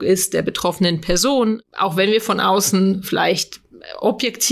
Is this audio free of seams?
no; 1 cut; at 1.6 s

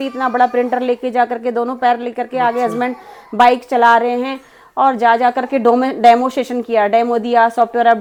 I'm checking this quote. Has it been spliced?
no; 0 cuts

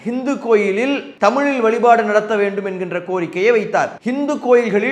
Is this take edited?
yes; 2 cuts; at 1.1 s, 4.0 s

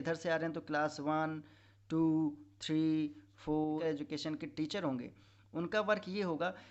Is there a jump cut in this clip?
yes; 1 cut; at 3.8 s

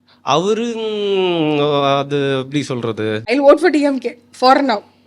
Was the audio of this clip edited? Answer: yes; 1 cut; at 3.2 s

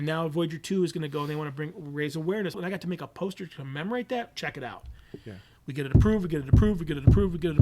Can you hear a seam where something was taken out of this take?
yes; 1 cut; at 2.6 s

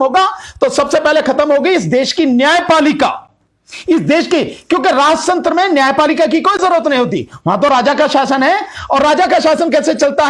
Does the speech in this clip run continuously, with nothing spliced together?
yes; 0 cuts

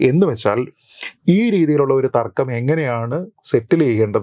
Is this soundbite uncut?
yes; 0 cuts

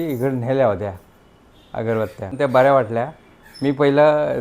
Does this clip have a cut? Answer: yes; 1 cut; at 2.4 s

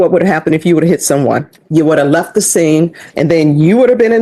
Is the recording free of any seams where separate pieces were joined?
no; 2 cuts; at 1.6 s, 3.0 s

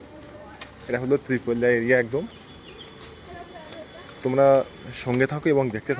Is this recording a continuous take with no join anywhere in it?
yes; 0 cuts

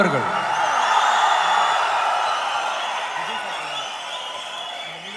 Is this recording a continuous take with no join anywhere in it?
yes; 0 cuts

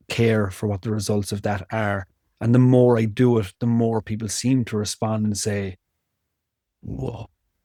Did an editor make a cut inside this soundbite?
no; 0 cuts

